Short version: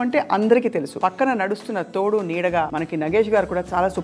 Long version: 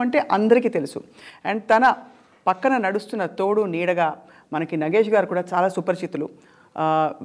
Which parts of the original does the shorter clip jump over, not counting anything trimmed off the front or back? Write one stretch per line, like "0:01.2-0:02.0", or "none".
0:00.9-0:02.3
0:04.2-0:04.5